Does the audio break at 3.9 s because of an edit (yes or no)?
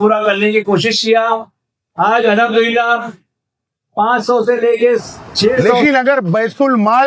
no